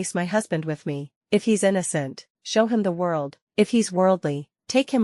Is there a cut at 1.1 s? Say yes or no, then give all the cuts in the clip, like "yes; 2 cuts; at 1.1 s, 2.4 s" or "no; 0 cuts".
yes; 1 cut; at 1.1 s